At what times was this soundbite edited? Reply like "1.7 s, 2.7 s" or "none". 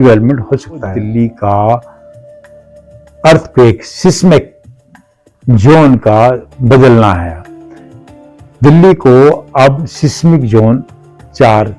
1.0 s